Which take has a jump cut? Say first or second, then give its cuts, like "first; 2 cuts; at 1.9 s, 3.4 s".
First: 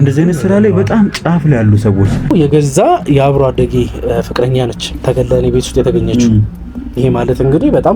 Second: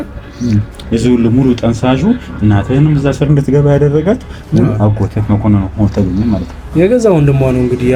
first; 1 cut; at 2.3 s